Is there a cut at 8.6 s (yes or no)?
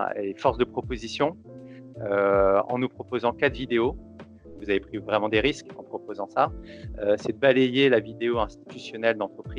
no